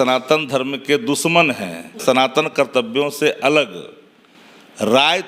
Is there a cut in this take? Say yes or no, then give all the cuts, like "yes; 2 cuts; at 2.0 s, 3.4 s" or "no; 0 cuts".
yes; 1 cut; at 2.0 s